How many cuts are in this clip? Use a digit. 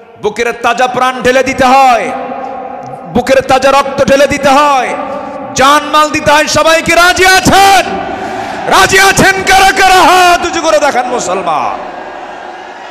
0